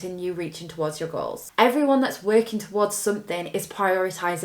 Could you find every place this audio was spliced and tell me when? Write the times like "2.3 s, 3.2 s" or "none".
1.5 s